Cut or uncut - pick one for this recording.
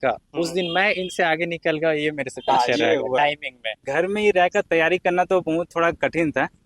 cut